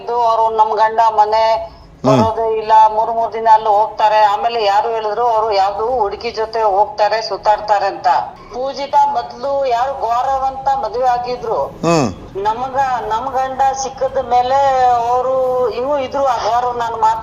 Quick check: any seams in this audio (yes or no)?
yes